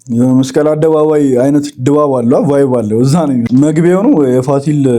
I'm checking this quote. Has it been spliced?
yes; 1 cut; at 3.5 s

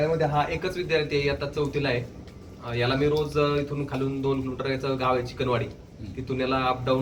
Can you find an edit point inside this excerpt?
no; 0 cuts

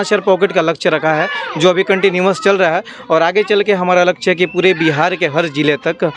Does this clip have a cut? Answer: no; 0 cuts

